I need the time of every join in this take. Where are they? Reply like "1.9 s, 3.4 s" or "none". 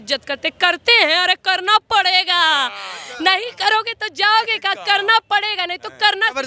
none